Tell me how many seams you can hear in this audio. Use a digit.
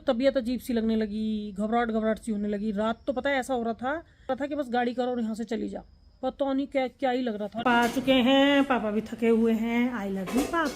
2